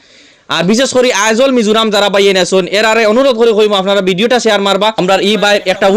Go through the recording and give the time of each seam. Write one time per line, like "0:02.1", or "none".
0:05.0